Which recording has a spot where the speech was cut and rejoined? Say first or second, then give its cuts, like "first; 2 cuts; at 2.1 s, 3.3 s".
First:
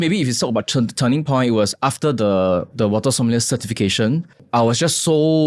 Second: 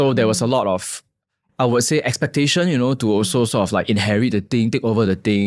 first; 1 cut; at 4.4 s